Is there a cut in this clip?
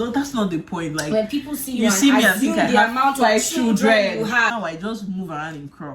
yes; 1 cut; at 4.2 s

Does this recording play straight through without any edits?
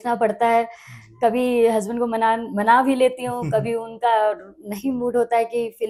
yes; 0 cuts

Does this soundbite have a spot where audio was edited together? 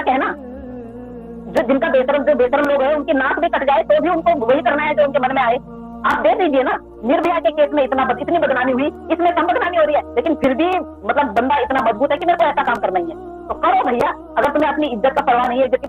no; 0 cuts

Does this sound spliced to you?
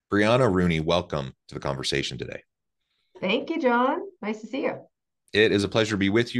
no; 0 cuts

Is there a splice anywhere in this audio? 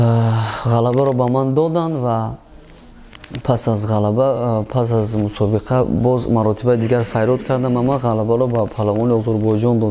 no; 0 cuts

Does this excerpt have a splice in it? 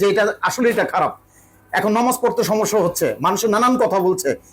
no; 0 cuts

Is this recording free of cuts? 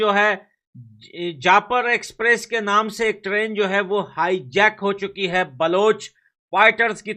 yes; 0 cuts

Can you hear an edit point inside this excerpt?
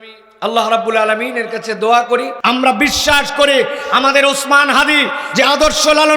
yes; 1 cut; at 2.3 s

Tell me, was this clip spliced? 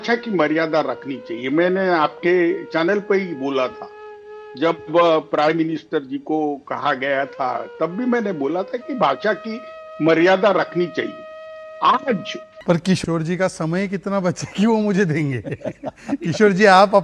yes; 1 cut; at 12.5 s

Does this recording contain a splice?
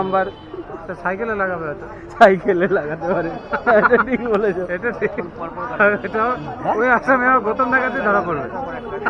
no; 0 cuts

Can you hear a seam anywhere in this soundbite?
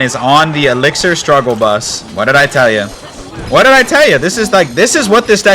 yes; 1 cut; at 2.0 s

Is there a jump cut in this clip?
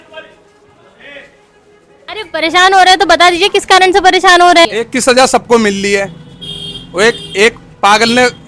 yes; 1 cut; at 4.7 s

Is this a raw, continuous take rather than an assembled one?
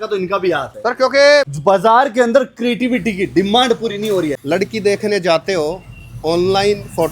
no; 2 cuts; at 1.5 s, 4.4 s

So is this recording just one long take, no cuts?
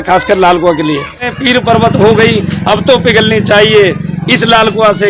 no; 1 cut; at 1.3 s

